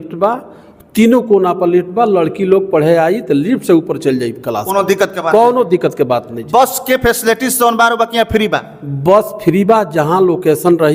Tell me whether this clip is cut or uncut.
uncut